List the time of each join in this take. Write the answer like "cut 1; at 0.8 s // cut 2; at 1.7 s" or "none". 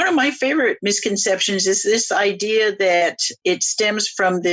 cut 1; at 0.8 s // cut 2; at 3.3 s